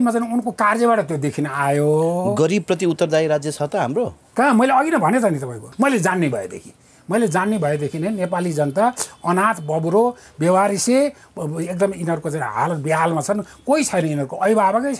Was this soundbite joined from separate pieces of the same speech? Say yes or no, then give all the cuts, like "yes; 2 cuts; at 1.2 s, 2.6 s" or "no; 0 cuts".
yes; 1 cut; at 5.6 s